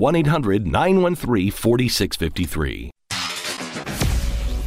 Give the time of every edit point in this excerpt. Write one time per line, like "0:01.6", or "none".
0:02.9